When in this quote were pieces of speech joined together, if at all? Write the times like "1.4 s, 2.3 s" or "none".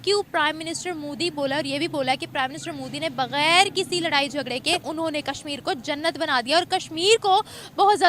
4.9 s